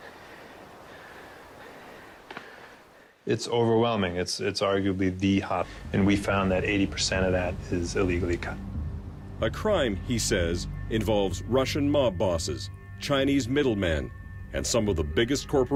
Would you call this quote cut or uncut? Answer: uncut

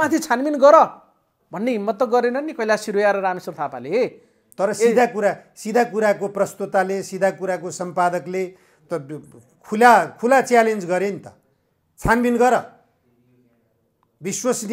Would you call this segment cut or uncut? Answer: uncut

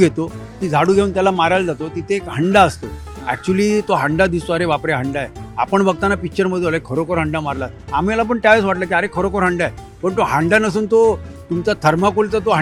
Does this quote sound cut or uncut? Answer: uncut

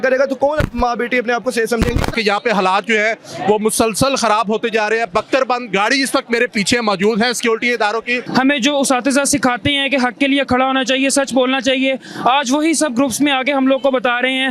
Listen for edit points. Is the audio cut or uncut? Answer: cut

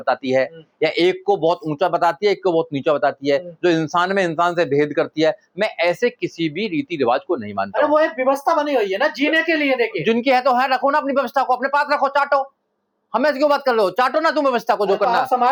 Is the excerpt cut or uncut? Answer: uncut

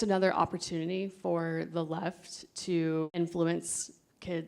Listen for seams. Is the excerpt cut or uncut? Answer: cut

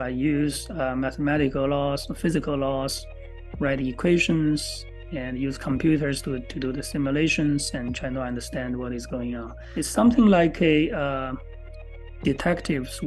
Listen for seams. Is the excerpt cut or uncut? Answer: cut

